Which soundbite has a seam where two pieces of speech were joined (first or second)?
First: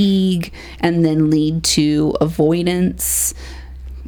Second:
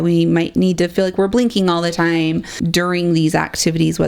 second